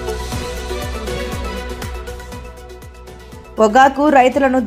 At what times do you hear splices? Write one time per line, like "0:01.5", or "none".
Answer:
none